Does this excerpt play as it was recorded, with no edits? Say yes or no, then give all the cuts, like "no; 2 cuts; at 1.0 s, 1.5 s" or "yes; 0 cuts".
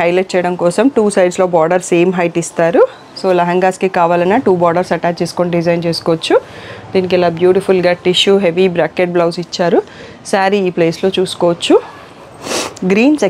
yes; 0 cuts